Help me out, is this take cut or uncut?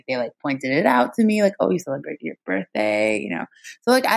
uncut